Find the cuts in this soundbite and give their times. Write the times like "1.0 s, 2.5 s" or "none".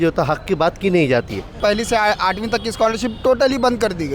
1.5 s